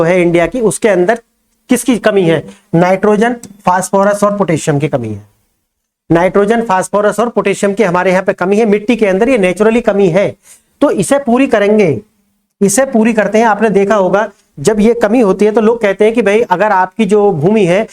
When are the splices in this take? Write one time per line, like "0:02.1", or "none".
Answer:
none

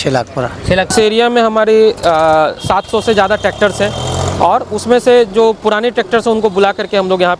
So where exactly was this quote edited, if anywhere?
0:00.9

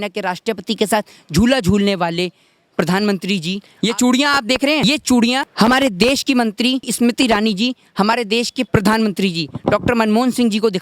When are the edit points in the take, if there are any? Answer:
0:03.6
0:04.8
0:05.5
0:06.9
0:08.6

